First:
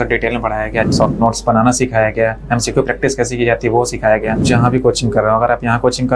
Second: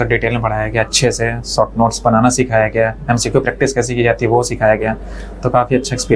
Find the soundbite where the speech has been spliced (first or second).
first